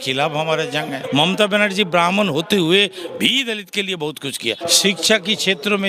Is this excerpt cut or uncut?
cut